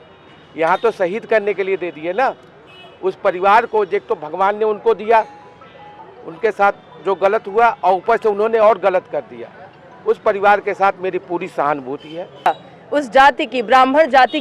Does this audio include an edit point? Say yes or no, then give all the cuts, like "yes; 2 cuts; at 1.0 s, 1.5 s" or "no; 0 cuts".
yes; 1 cut; at 12.5 s